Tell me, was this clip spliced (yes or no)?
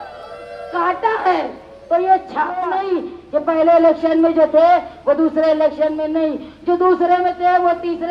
yes